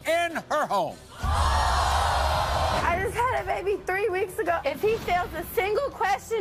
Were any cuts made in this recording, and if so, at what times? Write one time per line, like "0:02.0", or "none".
0:02.8
0:04.6